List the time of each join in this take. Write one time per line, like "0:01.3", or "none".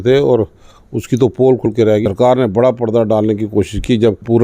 0:01.7